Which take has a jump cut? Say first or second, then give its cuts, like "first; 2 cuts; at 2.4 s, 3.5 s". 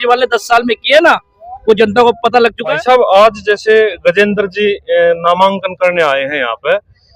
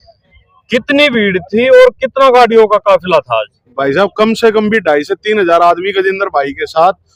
first; 1 cut; at 2.8 s